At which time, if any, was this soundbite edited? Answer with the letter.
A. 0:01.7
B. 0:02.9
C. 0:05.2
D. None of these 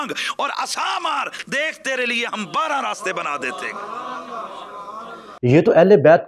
C